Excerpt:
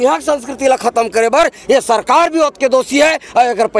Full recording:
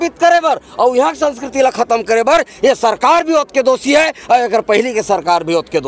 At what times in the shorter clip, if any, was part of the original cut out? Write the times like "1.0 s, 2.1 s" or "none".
none